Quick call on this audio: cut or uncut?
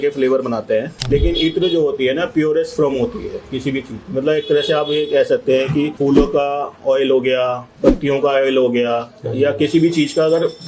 cut